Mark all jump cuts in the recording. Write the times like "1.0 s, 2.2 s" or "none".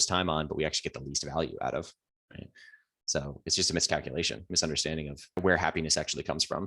5.4 s